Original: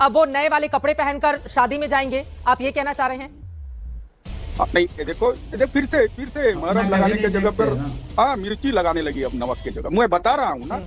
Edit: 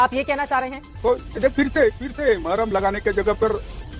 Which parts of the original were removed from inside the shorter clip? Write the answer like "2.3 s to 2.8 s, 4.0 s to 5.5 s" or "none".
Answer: 3.4 s to 5.1 s